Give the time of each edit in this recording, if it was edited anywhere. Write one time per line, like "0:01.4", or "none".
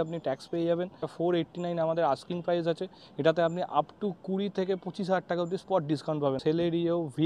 0:01.1
0:06.4